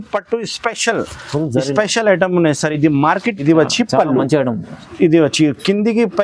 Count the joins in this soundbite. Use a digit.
1